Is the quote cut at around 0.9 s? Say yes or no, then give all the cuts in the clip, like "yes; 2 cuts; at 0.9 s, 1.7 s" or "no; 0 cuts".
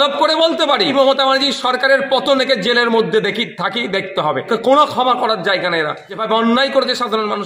yes; 3 cuts; at 0.9 s, 4.5 s, 6.1 s